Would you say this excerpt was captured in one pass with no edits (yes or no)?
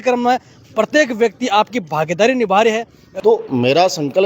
no